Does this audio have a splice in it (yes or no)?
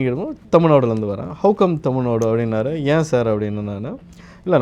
no